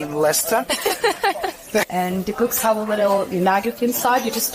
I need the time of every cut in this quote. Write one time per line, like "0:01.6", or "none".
0:01.9